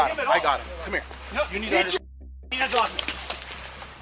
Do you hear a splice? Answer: yes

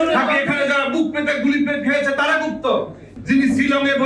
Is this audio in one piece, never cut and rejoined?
no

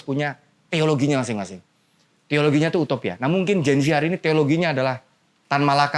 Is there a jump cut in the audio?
no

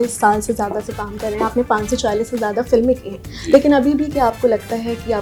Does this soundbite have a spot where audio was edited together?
no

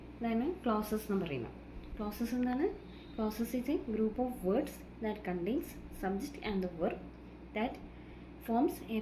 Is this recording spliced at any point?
no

